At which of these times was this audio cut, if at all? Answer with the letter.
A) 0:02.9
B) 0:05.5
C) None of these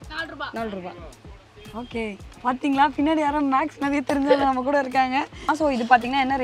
B